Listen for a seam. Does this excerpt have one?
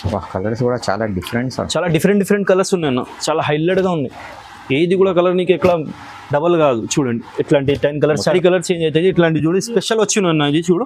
yes; 1 cut; at 8.3 s

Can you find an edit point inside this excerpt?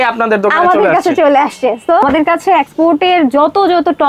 yes; 1 cut; at 2.0 s

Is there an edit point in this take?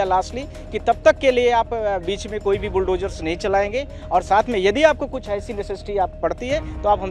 no; 0 cuts

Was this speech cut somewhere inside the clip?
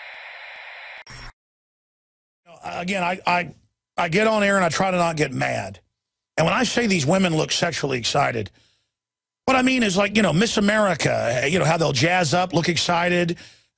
yes; 1 cut; at 1.0 s

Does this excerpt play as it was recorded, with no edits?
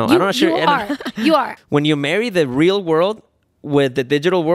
no; 1 cut; at 1.6 s

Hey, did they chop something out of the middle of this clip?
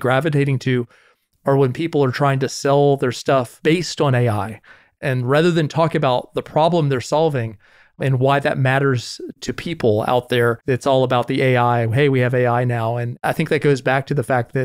yes; 2 cuts; at 10.6 s, 13.1 s

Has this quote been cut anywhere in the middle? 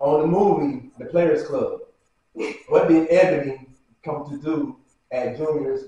no; 0 cuts

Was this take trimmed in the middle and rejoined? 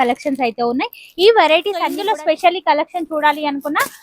yes; 1 cut; at 2.0 s

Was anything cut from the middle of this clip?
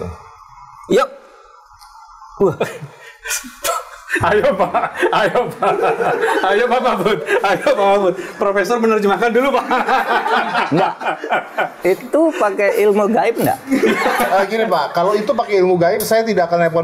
no; 0 cuts

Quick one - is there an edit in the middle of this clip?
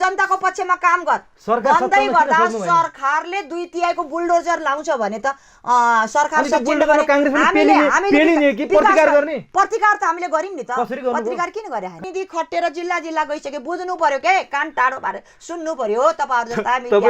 yes; 1 cut; at 12.0 s

